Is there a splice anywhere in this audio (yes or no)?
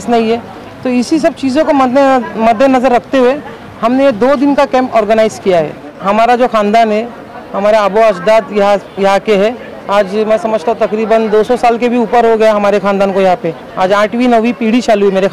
yes